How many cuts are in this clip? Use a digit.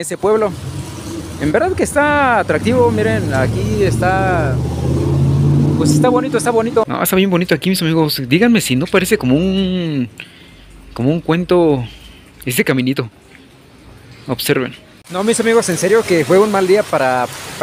2